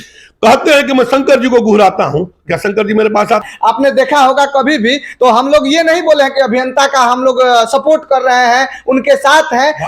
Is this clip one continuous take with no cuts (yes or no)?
no